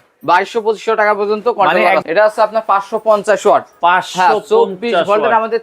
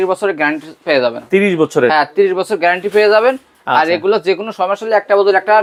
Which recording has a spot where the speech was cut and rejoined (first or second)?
first